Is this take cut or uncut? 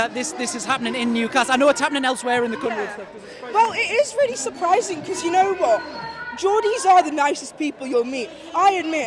uncut